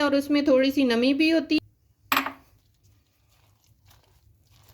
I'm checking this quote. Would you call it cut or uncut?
cut